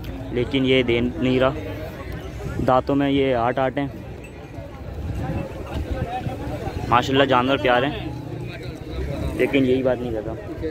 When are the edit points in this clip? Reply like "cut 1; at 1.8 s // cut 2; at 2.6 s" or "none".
none